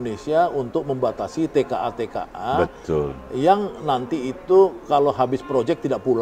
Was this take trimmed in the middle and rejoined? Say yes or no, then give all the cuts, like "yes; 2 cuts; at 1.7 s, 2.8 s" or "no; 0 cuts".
no; 0 cuts